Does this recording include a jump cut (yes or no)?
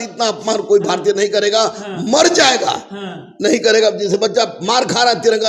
no